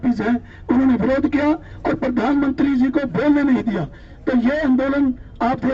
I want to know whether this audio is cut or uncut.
uncut